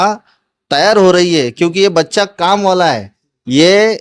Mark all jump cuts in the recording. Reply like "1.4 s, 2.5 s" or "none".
none

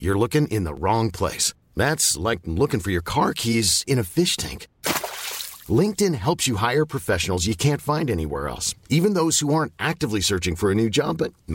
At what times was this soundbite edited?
none

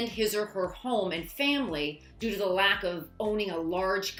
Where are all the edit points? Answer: none

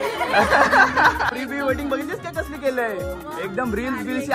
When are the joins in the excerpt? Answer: 1.3 s

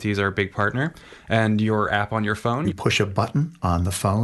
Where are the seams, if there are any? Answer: 2.7 s

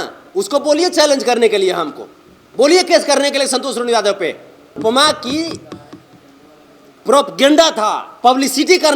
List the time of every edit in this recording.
4.8 s

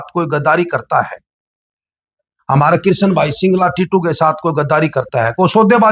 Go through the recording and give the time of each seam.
none

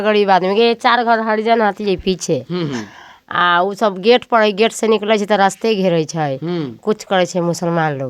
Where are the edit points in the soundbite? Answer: none

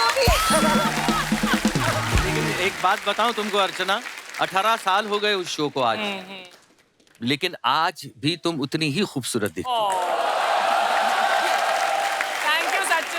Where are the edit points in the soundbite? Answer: 2.5 s

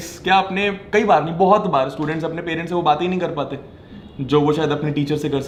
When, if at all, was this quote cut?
none

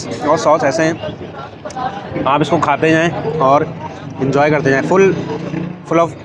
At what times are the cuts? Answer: none

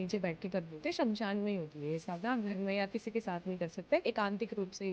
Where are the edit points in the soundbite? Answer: 4.0 s

